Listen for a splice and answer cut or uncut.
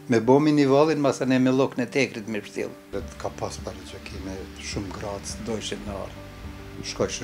cut